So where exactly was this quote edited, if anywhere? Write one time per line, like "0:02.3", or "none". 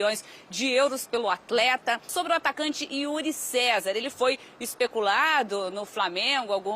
0:02.1